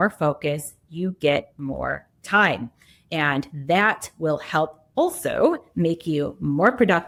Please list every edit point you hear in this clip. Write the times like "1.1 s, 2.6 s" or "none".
none